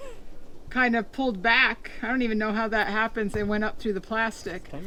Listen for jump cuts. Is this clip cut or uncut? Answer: uncut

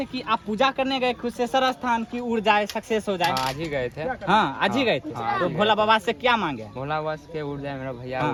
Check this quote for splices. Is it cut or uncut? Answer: uncut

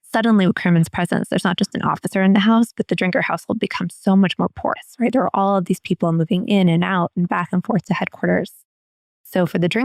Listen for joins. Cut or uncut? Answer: uncut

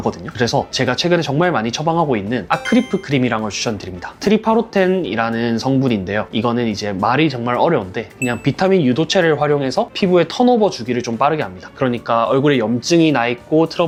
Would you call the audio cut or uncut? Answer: uncut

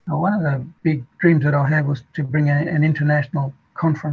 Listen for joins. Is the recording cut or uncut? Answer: uncut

